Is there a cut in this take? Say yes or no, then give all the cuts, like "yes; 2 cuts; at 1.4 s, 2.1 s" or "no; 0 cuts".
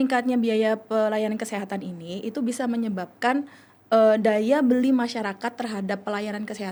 no; 0 cuts